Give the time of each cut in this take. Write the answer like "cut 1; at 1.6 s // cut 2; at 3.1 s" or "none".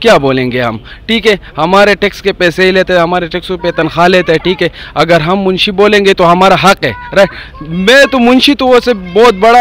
none

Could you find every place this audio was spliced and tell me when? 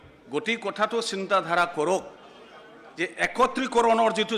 none

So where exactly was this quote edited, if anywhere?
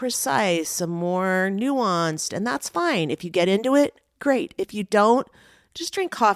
none

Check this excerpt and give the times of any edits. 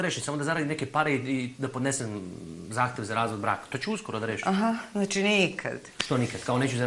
none

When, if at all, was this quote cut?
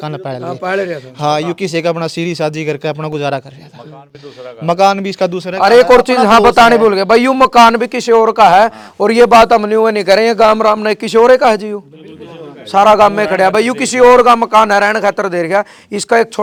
none

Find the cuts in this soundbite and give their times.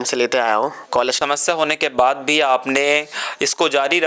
cut 1; at 1.2 s

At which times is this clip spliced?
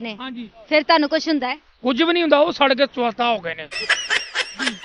none

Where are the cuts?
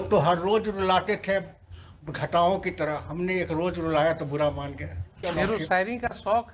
cut 1; at 5.2 s

